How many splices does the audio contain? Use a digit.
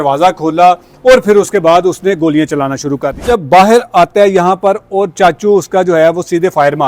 1